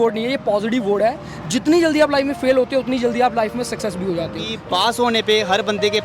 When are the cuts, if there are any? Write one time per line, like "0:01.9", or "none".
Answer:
0:04.5